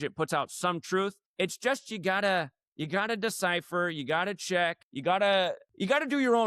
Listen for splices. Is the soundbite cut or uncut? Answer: cut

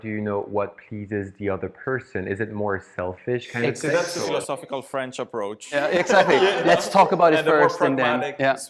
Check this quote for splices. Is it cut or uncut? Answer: uncut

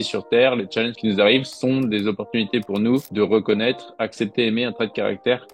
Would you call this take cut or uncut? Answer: uncut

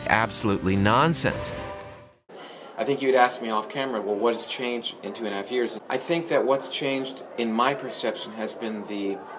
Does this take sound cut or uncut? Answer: cut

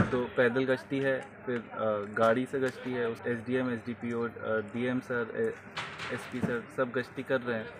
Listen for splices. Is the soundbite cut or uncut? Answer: cut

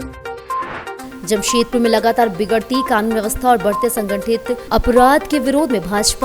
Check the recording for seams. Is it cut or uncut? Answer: cut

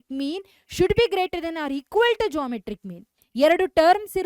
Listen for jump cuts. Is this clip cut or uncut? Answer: cut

